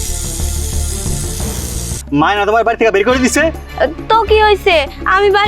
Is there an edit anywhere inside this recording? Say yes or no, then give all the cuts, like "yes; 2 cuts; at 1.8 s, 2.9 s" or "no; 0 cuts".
yes; 1 cut; at 2.0 s